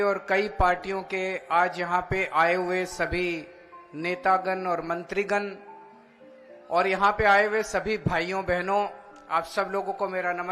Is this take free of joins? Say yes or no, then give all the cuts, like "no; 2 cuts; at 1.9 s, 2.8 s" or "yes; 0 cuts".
yes; 0 cuts